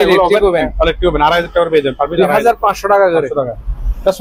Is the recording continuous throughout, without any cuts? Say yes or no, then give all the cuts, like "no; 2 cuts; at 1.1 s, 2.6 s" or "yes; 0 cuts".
yes; 0 cuts